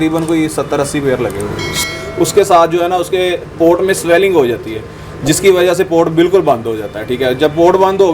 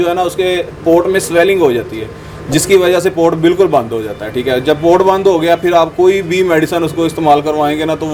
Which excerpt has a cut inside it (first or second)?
first